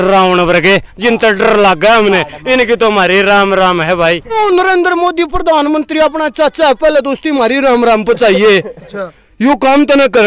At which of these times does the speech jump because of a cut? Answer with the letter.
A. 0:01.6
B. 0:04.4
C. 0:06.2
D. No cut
B